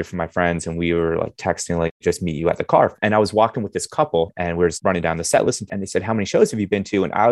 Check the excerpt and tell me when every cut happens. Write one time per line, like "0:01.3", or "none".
0:02.0
0:03.0
0:04.7
0:05.7

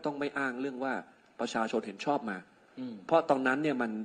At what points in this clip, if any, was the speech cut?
none

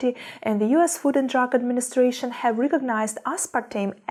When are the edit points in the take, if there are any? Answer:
none

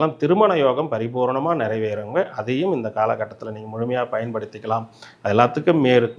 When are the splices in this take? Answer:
none

